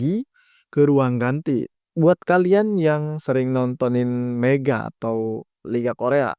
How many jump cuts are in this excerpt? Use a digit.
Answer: 1